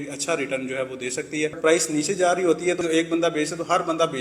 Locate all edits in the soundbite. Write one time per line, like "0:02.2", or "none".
0:01.6
0:02.8

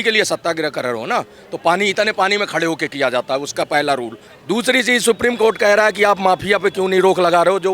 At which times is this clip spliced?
0:04.3

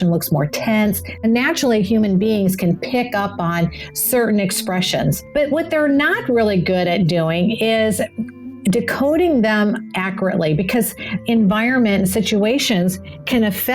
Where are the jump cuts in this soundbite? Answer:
0:01.2
0:05.2
0:11.1

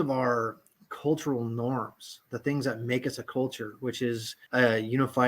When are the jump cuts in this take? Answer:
0:04.3

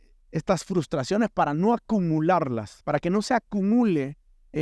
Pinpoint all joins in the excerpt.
0:02.7

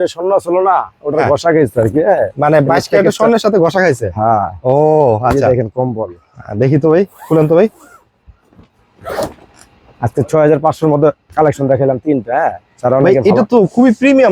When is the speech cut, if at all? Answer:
none

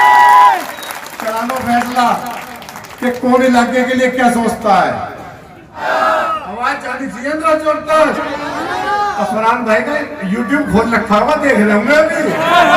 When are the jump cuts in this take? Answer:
0:05.8

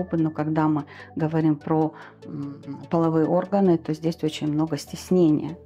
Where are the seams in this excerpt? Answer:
none

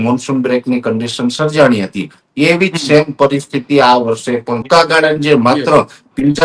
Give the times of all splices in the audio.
0:04.6

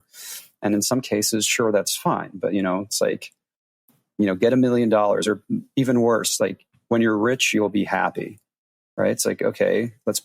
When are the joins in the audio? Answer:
none

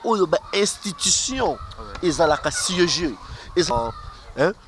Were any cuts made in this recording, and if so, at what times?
0:03.7

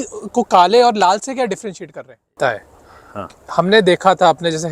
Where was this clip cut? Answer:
0:02.3

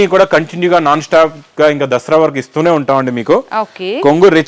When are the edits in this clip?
none

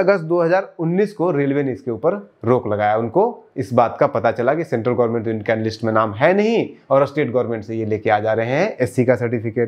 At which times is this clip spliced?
none

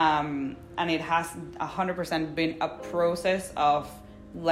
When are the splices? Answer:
none

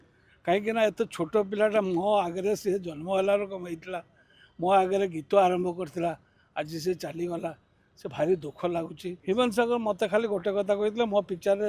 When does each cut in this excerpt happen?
0:09.1

